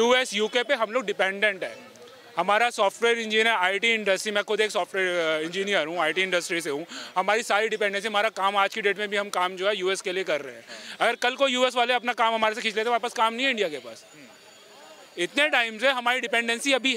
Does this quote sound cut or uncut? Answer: uncut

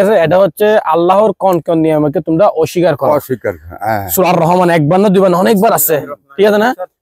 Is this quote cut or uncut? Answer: uncut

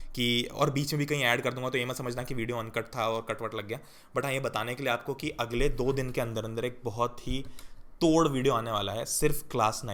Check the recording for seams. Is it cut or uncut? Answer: uncut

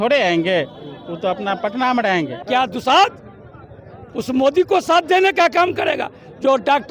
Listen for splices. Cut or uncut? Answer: cut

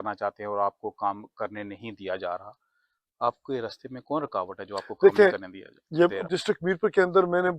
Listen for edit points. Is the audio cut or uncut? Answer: uncut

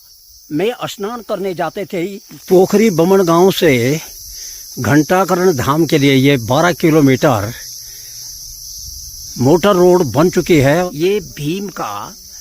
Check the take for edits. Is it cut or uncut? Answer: cut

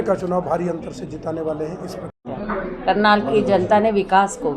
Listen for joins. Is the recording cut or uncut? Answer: cut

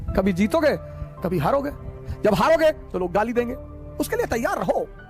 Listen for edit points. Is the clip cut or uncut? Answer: uncut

